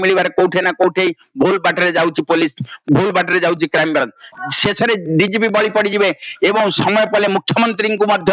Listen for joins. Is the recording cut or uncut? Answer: cut